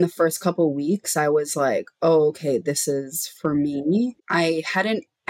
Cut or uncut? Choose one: cut